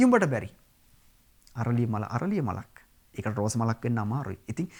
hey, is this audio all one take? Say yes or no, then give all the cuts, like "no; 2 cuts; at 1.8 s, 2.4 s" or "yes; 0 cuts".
yes; 0 cuts